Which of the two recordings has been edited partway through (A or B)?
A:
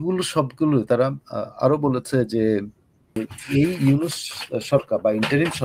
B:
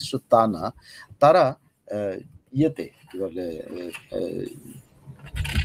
A